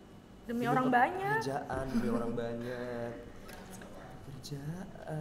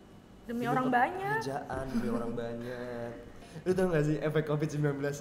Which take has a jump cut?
second; 1 cut; at 3.4 s

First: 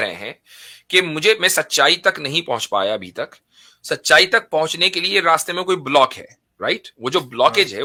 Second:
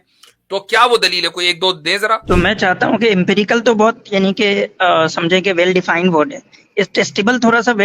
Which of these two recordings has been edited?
second; 1 cut; at 2.2 s

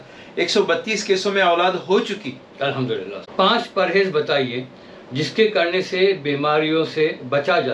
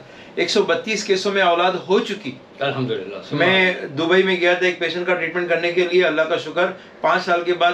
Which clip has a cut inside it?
first; 1 cut; at 3.2 s

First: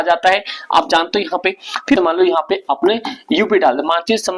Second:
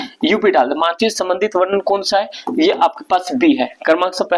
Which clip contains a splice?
first; 1 cut; at 2.0 s

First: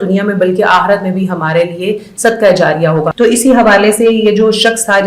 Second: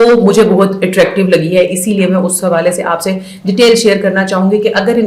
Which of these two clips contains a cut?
first; 1 cut; at 3.1 s

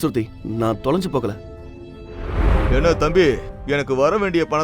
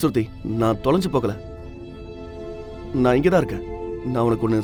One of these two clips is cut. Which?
first; 1 cut; at 2.5 s

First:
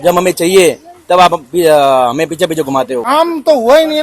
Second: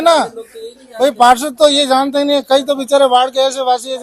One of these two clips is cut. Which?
first; 1 cut; at 3.0 s

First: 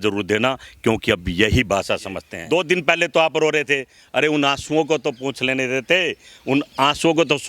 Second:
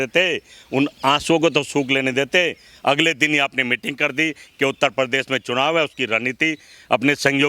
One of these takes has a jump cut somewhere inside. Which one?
first; 1 cut; at 2.3 s

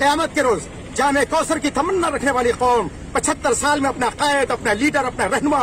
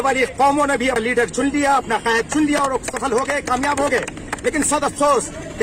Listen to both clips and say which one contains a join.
second; 1 cut; at 1.0 s

